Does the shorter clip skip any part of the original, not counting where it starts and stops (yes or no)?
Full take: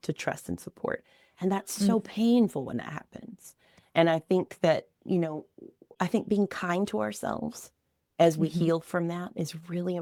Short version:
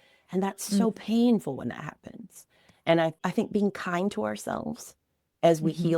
yes